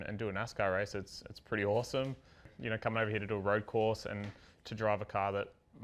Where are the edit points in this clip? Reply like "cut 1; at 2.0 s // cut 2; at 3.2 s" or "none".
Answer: cut 1; at 2.5 s